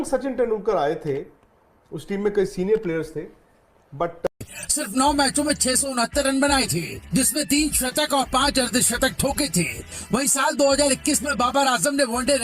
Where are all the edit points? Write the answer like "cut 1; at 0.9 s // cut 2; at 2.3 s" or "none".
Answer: cut 1; at 4.3 s